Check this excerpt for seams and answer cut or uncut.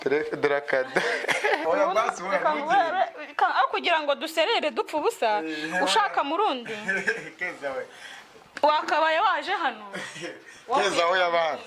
cut